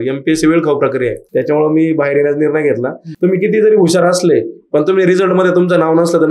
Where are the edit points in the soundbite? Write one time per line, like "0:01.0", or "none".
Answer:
0:01.2
0:03.1